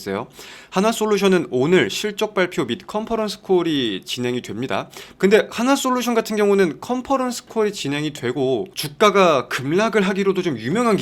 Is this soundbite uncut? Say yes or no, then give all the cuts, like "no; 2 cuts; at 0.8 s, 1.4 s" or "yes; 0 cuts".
no; 1 cut; at 5.0 s